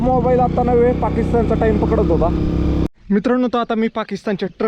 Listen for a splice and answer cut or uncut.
cut